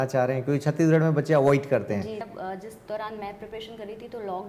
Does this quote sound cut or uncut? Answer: cut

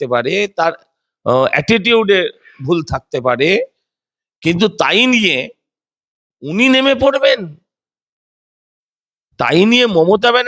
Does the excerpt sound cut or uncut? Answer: uncut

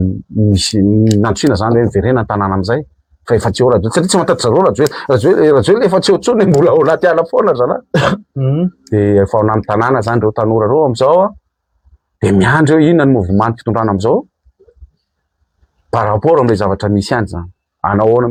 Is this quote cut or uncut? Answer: uncut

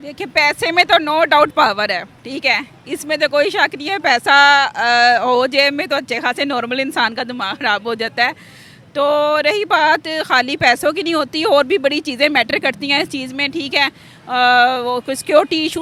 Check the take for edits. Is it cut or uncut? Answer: uncut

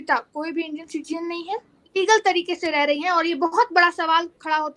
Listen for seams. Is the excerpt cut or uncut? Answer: cut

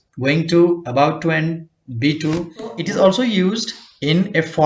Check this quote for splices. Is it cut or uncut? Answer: cut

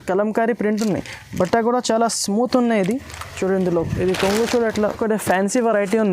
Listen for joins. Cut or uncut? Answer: cut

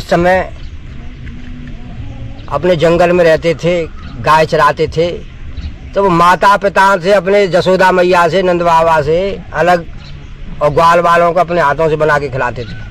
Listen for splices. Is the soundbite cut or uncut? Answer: uncut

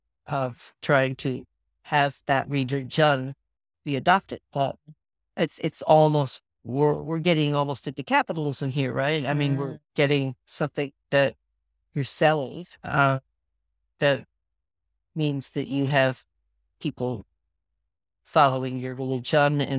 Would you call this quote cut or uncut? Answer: uncut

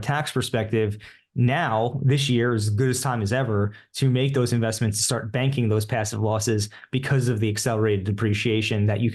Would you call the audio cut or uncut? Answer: uncut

